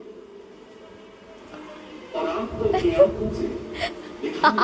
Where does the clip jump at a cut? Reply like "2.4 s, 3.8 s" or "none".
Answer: none